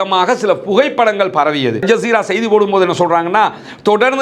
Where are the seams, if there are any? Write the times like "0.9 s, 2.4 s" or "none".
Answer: 1.8 s